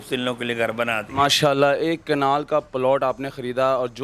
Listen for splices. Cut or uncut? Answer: uncut